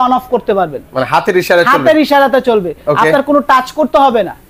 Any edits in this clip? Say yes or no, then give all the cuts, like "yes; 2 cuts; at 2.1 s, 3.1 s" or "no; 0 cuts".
no; 0 cuts